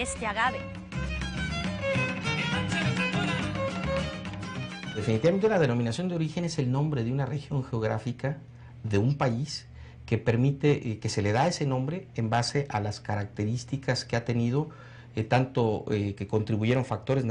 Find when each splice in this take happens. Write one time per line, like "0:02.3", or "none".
0:09.0